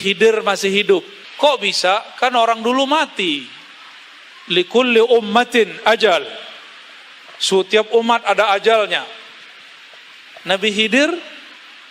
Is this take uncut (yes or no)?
no